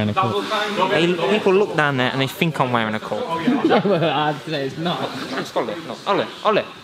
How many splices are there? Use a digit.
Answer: 1